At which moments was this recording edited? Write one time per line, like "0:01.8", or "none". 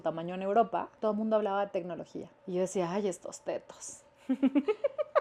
0:00.9
0:02.3